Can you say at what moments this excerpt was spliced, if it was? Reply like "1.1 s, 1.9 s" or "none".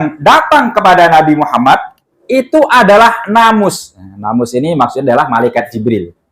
2.1 s